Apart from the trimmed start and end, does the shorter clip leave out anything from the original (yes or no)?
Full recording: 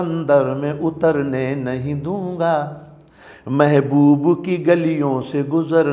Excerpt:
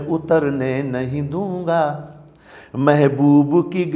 no